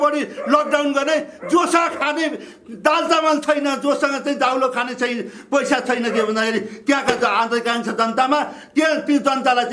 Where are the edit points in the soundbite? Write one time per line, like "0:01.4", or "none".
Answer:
none